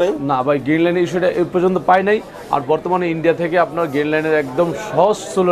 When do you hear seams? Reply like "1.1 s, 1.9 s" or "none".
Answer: none